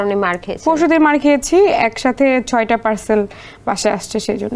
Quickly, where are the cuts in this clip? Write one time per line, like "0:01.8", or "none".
none